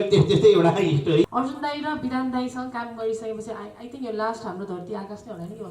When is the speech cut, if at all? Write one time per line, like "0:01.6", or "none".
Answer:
0:01.3